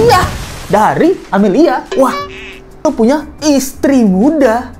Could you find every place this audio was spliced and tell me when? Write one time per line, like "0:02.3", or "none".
0:02.9